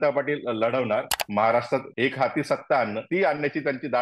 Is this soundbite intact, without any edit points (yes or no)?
no